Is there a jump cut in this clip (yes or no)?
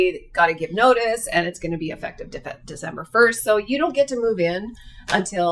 no